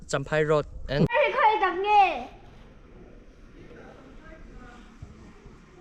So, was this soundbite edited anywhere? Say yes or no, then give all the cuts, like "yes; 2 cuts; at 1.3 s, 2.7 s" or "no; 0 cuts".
yes; 1 cut; at 1.1 s